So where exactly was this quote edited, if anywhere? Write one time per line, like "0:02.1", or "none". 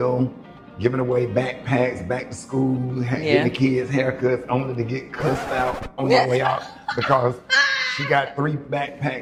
none